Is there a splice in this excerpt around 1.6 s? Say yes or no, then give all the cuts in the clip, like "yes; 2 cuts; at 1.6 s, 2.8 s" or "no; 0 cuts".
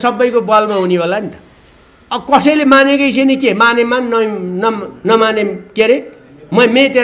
no; 0 cuts